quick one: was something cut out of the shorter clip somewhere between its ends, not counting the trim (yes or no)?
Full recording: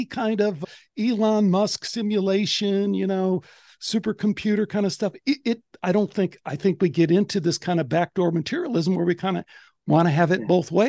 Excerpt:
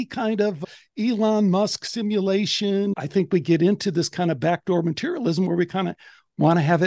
yes